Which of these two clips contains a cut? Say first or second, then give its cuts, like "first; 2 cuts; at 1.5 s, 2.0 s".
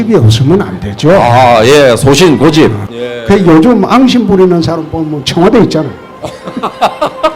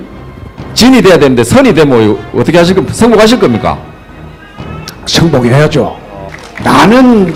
first; 1 cut; at 2.8 s